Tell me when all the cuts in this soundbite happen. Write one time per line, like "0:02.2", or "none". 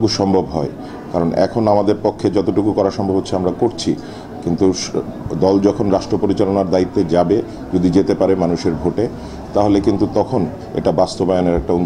none